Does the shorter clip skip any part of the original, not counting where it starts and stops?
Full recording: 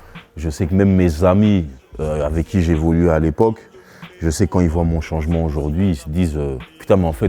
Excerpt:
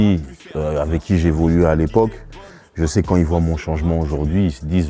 no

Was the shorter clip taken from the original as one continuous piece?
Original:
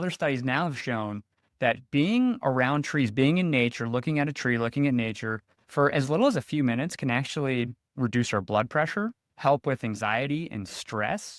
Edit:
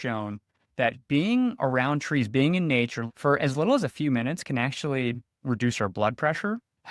no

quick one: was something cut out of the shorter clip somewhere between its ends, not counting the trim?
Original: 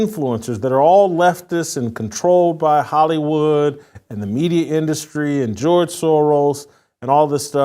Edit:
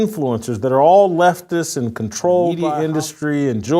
yes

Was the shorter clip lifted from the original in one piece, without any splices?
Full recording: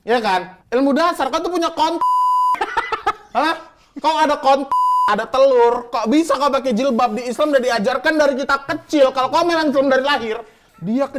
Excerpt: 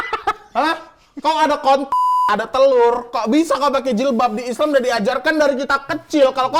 yes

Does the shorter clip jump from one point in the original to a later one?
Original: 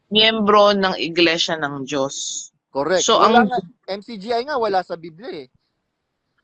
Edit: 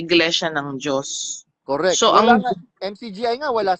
no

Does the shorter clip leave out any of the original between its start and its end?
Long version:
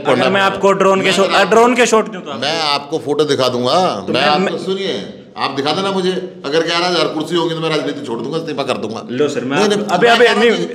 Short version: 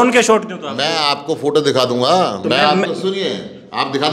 no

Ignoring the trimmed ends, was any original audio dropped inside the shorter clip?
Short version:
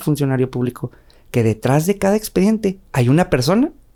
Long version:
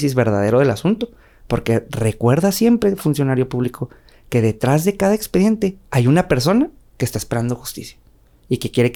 no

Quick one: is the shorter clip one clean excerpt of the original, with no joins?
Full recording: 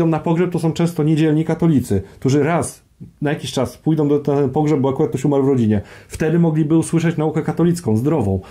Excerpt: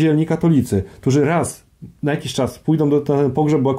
yes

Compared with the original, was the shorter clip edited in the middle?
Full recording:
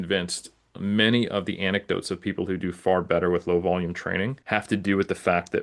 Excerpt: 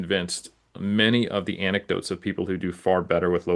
no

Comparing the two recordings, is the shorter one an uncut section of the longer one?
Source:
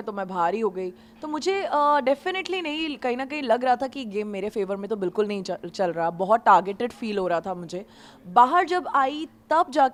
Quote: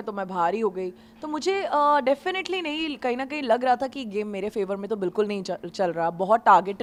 yes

